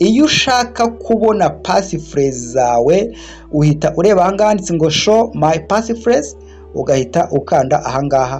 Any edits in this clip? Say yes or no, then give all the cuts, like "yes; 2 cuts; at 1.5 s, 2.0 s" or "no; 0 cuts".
no; 0 cuts